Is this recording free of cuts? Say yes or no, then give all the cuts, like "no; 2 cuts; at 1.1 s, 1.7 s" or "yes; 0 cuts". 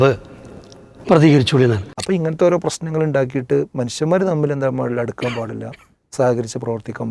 no; 1 cut; at 1.9 s